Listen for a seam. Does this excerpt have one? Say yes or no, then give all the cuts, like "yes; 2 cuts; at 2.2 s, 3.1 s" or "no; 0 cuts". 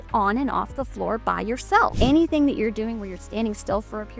yes; 1 cut; at 1.9 s